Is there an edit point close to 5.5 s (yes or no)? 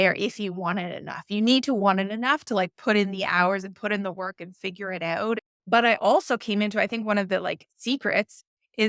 yes